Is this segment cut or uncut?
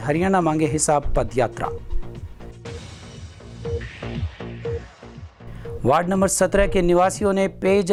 uncut